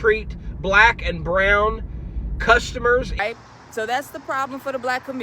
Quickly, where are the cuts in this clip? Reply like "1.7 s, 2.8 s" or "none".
3.2 s